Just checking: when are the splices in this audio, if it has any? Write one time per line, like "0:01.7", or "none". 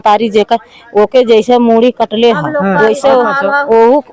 none